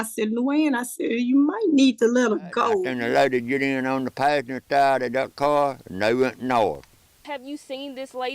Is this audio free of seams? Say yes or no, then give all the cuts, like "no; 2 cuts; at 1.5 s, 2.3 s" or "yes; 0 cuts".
no; 1 cut; at 2.8 s